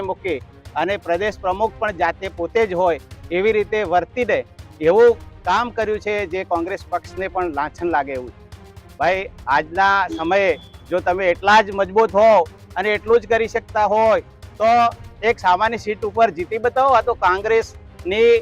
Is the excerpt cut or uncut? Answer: uncut